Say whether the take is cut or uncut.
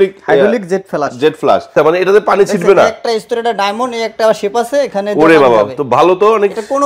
cut